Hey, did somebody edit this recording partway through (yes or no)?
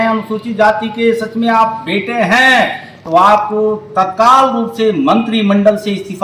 no